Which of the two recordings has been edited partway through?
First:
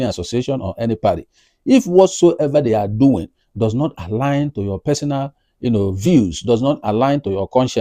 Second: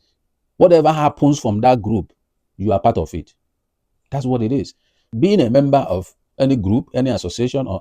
second; 1 cut; at 5.1 s

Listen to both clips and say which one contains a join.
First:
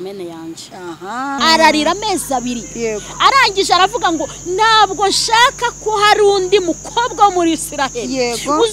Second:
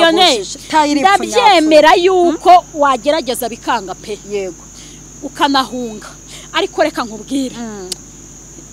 first; 1 cut; at 1.4 s

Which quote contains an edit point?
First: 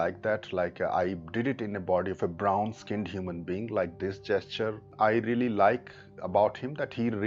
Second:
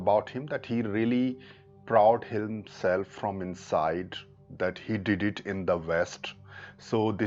first; 1 cut; at 4.9 s

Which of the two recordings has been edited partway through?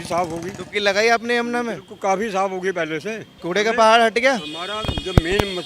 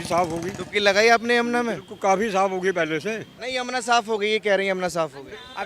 second; 1 cut; at 3.3 s

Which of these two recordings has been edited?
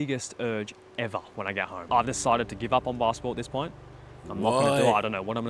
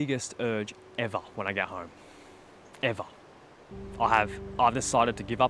first; 1 cut; at 1.8 s

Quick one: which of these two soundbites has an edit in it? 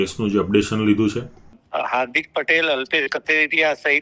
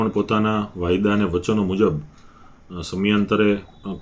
first; 1 cut; at 1.6 s

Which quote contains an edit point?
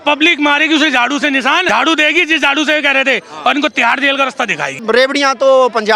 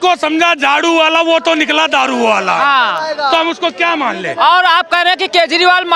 first; 2 cuts; at 1.7 s, 4.8 s

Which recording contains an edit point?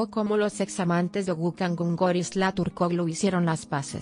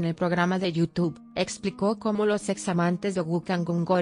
second; 1 cut; at 0.9 s

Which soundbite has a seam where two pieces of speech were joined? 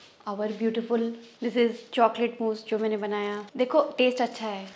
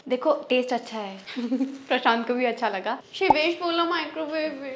second; 1 cut; at 3.0 s

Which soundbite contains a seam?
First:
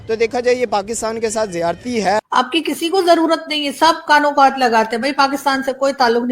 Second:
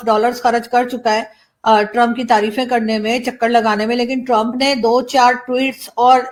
first; 1 cut; at 2.2 s

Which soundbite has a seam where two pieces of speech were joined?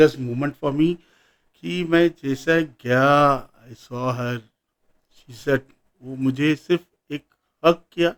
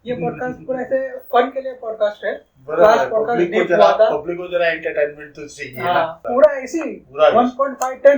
second; 1 cut; at 6.2 s

